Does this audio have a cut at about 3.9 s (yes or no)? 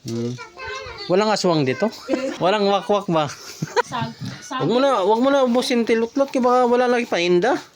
yes